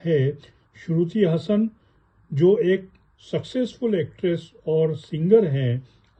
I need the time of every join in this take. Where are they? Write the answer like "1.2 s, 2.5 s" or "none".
none